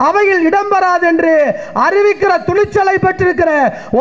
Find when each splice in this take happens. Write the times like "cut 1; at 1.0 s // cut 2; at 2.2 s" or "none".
none